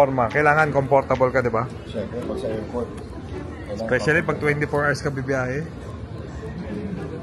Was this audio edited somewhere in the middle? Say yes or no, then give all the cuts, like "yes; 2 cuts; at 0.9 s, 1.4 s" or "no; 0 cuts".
no; 0 cuts